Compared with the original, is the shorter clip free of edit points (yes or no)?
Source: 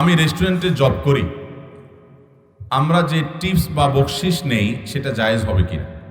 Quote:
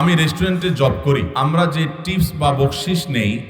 no